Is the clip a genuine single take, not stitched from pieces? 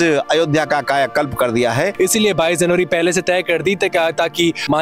no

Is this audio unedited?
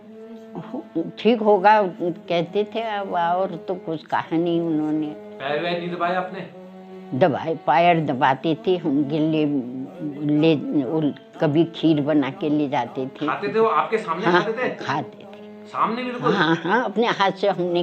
yes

